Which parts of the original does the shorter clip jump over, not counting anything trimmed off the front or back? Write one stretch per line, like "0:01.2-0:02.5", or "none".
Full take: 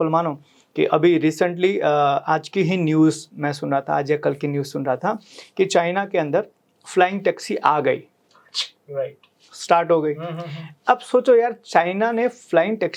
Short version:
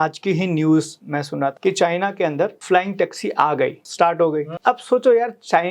0:03.9-0:05.5
0:06.5-0:06.8
0:08.1-0:09.5
0:10.2-0:10.7